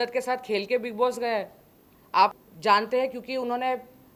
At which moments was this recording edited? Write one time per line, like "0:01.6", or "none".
0:02.3